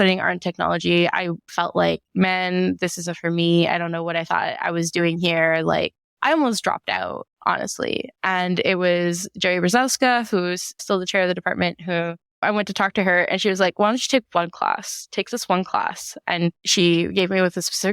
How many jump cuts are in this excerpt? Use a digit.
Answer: 2